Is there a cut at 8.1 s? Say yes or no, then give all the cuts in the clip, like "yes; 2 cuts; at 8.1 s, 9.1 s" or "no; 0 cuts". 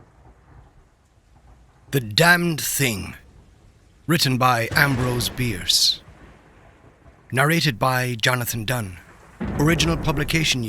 no; 1 cut; at 1.4 s